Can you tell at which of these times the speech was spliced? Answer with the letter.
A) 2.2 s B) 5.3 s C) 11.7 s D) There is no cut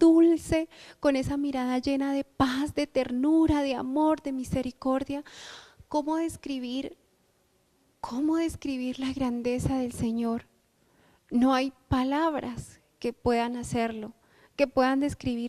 B